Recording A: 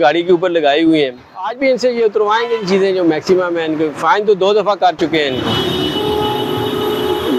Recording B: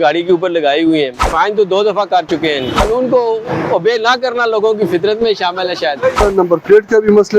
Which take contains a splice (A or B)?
B